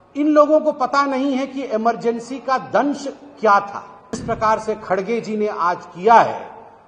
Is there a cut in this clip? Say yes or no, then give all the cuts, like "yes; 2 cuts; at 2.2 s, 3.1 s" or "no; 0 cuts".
yes; 1 cut; at 4.2 s